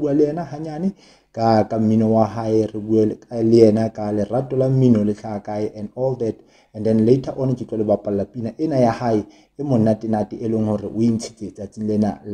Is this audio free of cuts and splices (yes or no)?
yes